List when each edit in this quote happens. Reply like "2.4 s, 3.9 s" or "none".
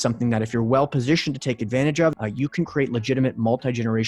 2.2 s